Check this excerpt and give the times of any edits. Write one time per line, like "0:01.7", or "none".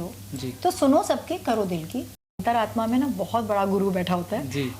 0:02.2